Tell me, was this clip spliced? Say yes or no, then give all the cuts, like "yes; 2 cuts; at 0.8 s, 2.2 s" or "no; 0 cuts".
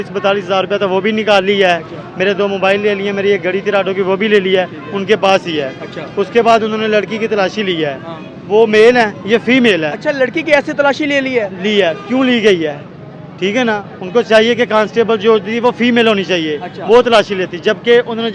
no; 0 cuts